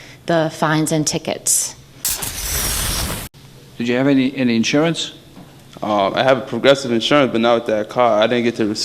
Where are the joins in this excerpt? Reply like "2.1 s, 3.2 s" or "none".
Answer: 1.9 s, 3.4 s